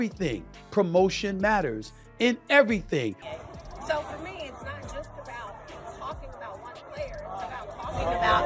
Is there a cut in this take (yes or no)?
yes